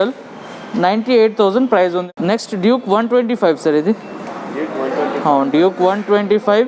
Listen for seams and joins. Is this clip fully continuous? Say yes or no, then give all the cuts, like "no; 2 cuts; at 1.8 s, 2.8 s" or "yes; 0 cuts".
no; 1 cut; at 2.1 s